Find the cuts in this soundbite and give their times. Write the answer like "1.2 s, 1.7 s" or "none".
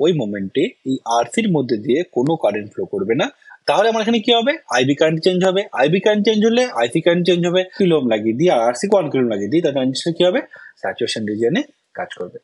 3.5 s, 7.7 s